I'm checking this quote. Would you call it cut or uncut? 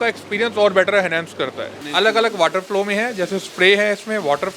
cut